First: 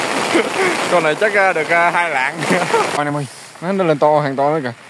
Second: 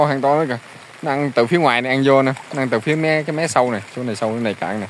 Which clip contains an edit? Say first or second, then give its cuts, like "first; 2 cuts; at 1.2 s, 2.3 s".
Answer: first; 1 cut; at 2.9 s